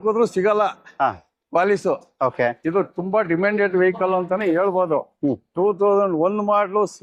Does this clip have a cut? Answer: no; 0 cuts

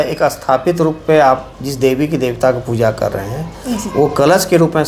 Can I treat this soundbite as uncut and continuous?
yes; 0 cuts

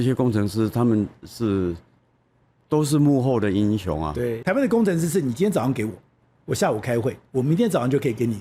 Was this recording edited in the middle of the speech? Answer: yes; 1 cut; at 4.4 s

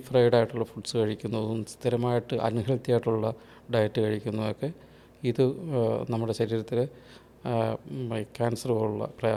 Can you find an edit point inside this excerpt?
no; 0 cuts

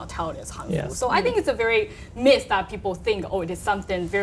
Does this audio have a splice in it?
no; 0 cuts

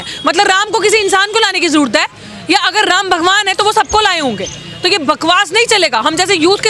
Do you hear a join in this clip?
no; 0 cuts

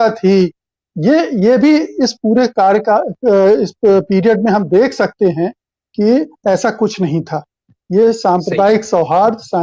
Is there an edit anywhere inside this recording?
no; 0 cuts

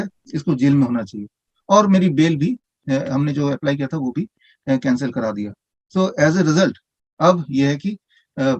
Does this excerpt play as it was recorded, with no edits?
yes; 0 cuts

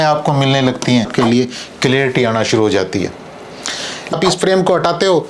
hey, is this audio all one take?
no; 2 cuts; at 1.1 s, 4.1 s

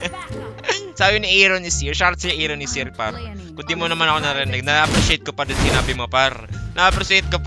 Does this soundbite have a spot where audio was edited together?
no; 0 cuts

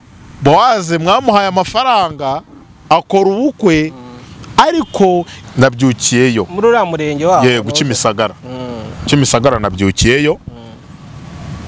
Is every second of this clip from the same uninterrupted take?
no; 1 cut; at 5.3 s

